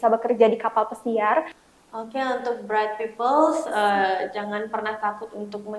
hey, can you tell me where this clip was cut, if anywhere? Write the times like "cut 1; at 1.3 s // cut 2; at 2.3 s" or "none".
cut 1; at 1.6 s